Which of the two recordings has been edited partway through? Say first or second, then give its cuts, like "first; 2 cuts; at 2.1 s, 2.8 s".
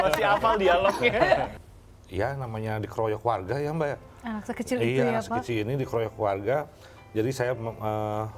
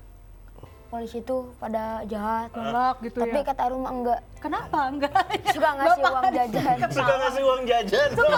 first; 1 cut; at 1.5 s